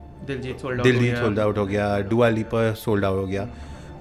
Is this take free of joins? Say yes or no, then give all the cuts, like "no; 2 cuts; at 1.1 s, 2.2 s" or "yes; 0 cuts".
yes; 0 cuts